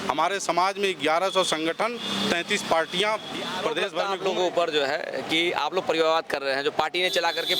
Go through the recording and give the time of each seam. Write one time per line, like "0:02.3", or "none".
0:03.9